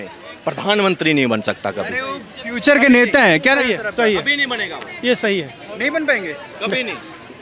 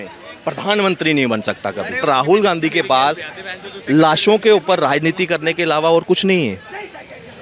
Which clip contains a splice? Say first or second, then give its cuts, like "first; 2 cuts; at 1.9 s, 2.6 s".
second; 1 cut; at 2.0 s